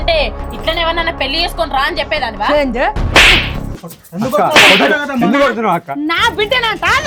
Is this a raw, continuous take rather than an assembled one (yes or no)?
yes